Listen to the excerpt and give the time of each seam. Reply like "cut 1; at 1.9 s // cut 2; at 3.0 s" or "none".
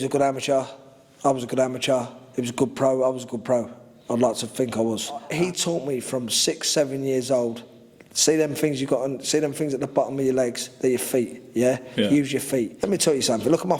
cut 1; at 5.3 s // cut 2; at 12.8 s